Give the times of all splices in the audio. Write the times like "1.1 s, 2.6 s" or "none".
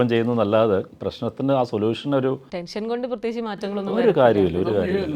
1.0 s, 2.5 s